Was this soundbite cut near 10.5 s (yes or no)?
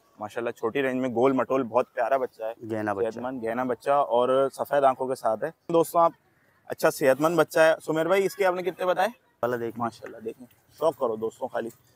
no